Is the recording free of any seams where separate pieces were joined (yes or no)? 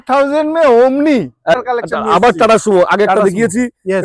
no